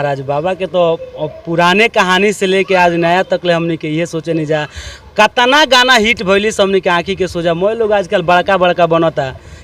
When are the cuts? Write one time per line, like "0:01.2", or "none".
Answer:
none